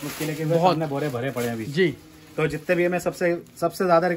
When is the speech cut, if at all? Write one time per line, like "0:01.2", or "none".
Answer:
none